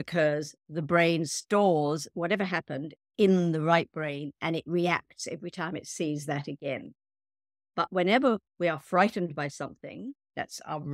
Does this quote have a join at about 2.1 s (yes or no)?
yes